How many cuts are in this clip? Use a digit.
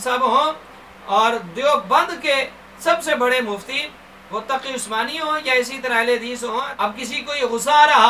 1